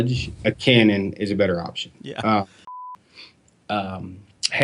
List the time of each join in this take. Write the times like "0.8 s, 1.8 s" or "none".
2.7 s